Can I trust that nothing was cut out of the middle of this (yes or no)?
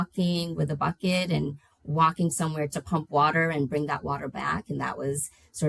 yes